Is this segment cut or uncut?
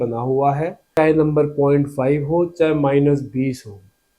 cut